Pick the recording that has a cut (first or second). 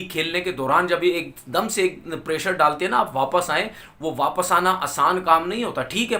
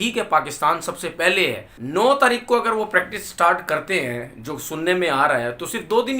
second